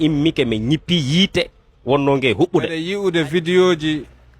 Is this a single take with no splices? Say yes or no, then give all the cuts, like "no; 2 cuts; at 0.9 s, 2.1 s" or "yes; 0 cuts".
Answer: no; 1 cut; at 2.8 s